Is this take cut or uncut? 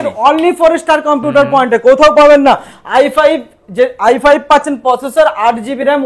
uncut